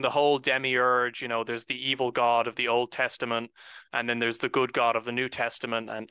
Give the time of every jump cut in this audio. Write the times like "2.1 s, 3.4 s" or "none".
none